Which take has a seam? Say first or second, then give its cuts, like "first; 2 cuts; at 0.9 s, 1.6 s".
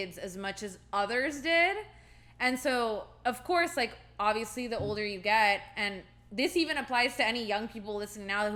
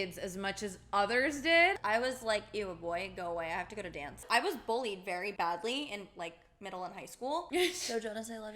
second; 4 cuts; at 1.8 s, 4.2 s, 5.3 s, 7.5 s